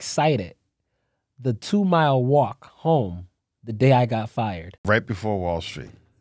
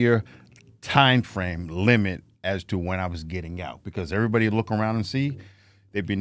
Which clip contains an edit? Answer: first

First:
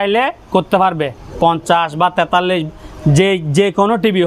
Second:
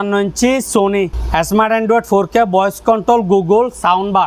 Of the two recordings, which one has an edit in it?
second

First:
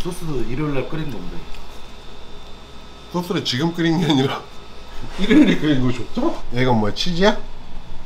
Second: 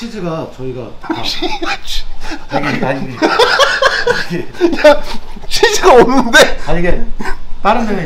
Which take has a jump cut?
first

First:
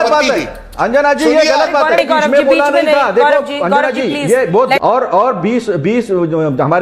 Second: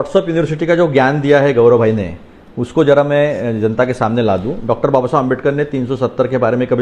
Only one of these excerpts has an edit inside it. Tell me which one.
first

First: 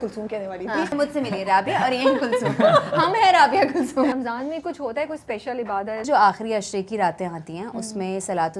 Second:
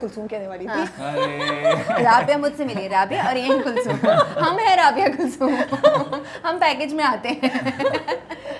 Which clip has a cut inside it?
first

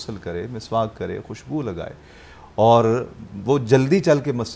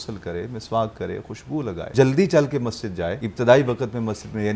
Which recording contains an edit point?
second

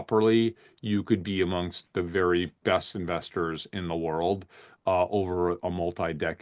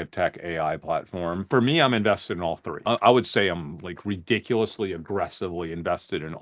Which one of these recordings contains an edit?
second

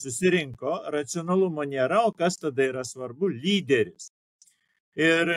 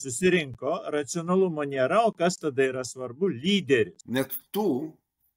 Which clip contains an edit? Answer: second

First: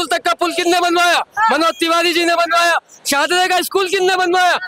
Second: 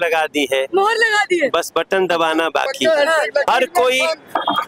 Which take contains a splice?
second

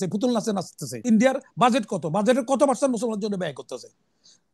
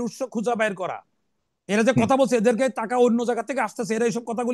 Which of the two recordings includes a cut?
first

